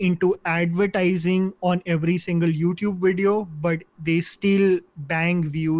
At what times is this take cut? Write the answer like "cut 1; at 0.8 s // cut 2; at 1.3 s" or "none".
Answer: none